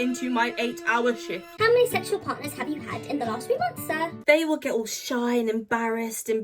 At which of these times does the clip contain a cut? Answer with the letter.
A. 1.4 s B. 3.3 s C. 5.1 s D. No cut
A